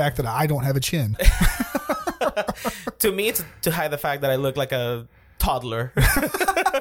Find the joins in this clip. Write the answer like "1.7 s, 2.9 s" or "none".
none